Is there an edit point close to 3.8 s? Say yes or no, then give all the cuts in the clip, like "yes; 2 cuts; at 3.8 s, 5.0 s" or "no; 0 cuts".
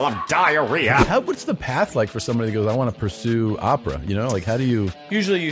no; 1 cut; at 1.0 s